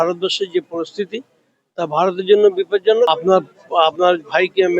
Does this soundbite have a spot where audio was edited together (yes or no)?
yes